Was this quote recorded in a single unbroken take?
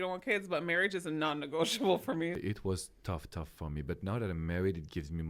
no; 1 cut; at 2.4 s

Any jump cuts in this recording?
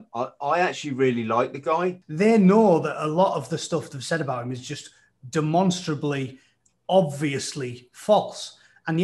yes; 1 cut; at 2.0 s

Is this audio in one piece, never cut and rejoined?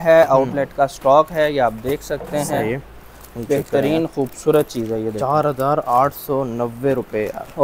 yes; 0 cuts

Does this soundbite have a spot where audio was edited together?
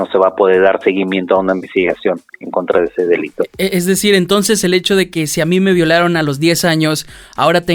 no; 0 cuts

